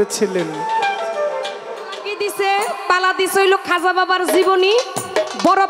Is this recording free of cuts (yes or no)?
no